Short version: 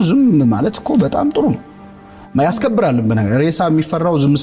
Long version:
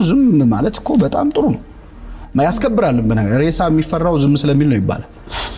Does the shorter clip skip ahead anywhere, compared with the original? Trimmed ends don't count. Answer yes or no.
no